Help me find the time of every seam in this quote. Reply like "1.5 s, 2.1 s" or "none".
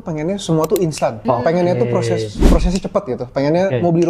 1.2 s